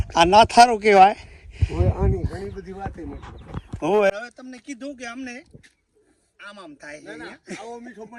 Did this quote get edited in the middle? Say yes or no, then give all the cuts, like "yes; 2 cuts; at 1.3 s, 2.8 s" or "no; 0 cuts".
yes; 1 cut; at 4.1 s